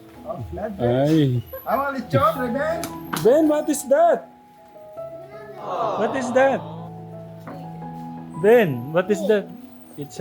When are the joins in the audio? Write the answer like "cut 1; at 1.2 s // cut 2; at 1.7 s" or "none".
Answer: cut 1; at 4.2 s // cut 2; at 5.9 s